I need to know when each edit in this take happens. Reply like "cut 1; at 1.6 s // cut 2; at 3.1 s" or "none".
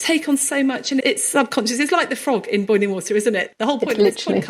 cut 1; at 1.0 s // cut 2; at 3.5 s